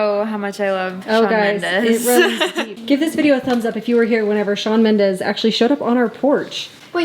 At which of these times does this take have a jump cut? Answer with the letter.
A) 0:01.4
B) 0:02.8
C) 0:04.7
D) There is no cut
B